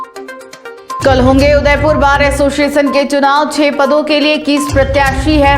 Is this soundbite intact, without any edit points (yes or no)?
no